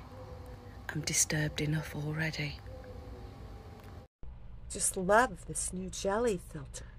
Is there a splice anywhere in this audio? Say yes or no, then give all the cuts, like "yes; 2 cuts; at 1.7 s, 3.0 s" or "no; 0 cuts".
yes; 1 cut; at 4.1 s